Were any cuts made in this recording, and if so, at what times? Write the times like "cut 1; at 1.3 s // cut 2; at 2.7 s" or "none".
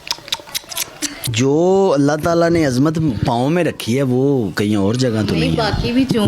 cut 1; at 1.2 s